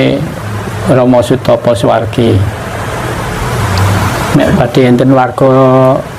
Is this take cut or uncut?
cut